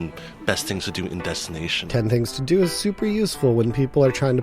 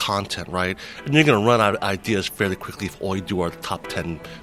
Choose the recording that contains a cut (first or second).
first